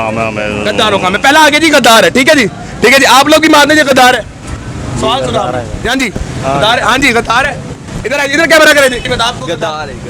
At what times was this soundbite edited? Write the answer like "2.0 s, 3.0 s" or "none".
9.1 s